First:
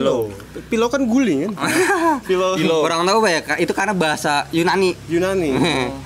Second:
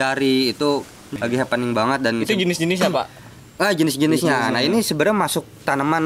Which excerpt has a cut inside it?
second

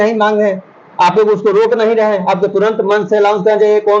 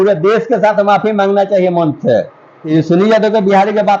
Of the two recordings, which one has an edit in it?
second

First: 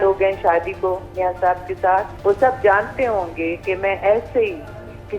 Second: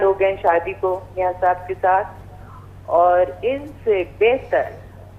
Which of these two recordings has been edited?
first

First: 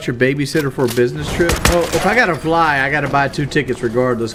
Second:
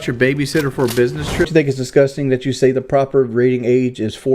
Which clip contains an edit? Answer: second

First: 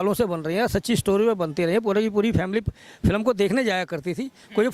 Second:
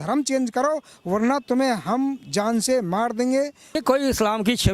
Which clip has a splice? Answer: second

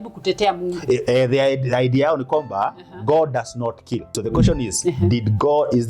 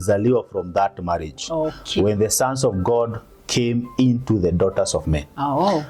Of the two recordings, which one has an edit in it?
first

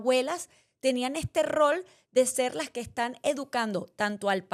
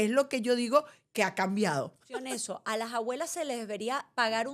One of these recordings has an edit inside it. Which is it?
second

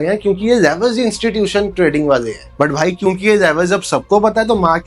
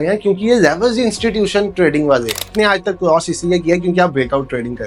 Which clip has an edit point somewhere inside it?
second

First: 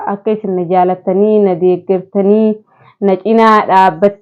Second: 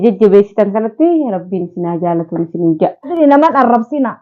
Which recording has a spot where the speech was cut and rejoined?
second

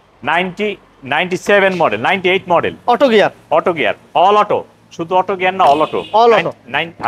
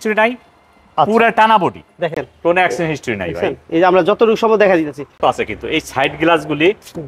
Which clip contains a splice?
second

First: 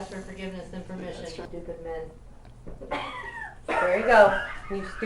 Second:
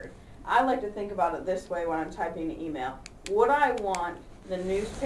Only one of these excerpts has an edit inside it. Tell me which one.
first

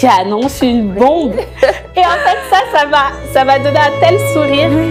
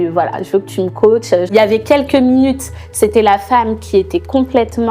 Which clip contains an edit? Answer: second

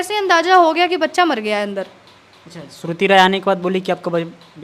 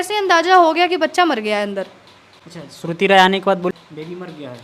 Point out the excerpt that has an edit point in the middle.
second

